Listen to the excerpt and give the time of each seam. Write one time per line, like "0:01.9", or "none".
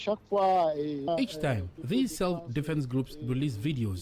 0:01.1